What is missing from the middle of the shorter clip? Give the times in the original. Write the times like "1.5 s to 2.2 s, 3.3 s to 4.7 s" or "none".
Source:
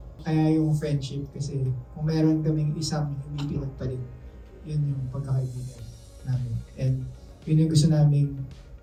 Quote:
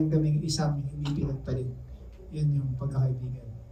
none

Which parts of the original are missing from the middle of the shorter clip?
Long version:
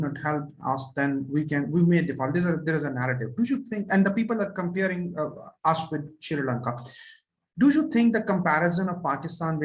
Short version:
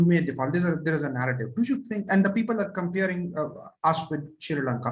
none

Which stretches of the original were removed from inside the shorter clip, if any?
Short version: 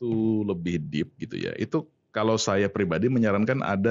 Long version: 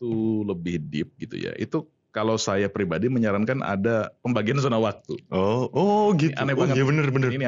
none

